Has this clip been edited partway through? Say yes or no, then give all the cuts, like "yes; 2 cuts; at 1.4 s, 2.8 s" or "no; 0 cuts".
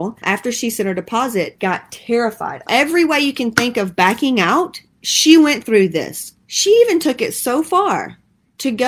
no; 0 cuts